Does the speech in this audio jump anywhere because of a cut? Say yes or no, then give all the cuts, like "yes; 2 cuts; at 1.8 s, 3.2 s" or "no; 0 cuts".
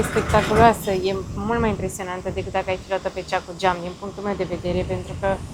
no; 0 cuts